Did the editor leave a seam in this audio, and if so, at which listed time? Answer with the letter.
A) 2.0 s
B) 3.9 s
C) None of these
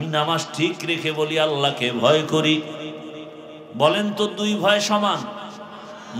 C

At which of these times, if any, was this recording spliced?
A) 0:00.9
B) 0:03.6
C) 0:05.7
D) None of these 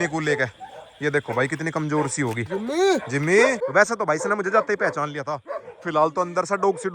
D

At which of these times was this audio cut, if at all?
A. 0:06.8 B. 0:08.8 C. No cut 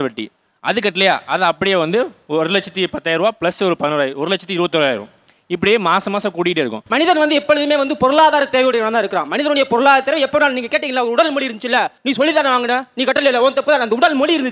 A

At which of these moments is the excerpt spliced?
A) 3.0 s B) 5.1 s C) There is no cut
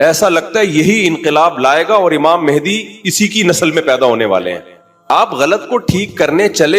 B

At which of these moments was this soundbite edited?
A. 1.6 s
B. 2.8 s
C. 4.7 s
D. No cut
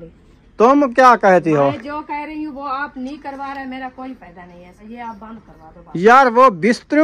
C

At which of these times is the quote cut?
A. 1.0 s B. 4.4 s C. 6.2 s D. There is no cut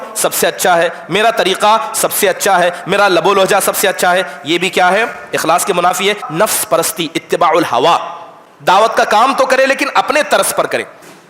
C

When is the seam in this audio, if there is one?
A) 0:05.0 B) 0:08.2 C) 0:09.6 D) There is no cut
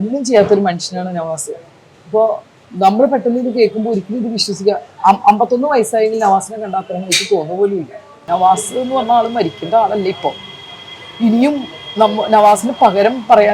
B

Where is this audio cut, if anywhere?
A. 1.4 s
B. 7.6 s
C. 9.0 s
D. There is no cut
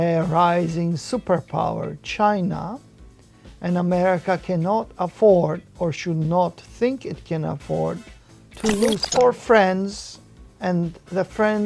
C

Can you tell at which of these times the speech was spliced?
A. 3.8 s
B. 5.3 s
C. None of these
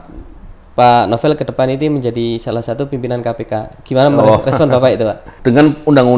B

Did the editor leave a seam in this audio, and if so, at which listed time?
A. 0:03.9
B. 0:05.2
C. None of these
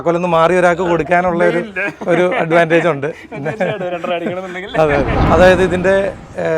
B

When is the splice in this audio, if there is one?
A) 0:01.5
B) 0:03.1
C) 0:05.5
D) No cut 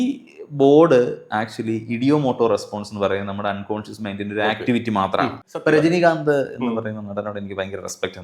C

